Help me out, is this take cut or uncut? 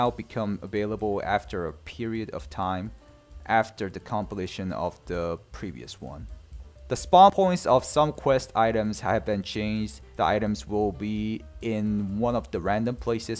cut